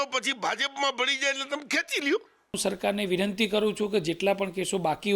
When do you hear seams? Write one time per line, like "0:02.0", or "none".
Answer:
0:02.6